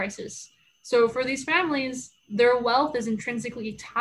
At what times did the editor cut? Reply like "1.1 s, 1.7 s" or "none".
none